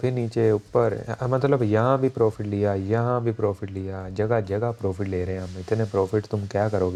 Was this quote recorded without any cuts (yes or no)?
yes